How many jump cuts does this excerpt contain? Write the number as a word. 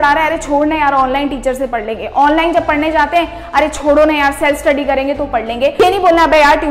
one